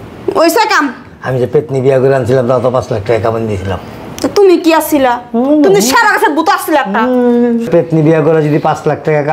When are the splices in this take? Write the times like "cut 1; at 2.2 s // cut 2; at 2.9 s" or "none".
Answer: none

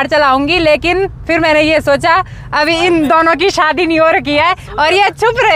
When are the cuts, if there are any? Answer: none

